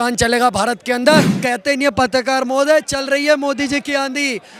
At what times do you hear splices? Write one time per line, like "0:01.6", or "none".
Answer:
0:01.4